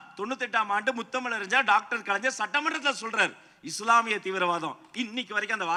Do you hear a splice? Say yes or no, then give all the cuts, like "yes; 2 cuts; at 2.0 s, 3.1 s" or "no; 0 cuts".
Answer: no; 0 cuts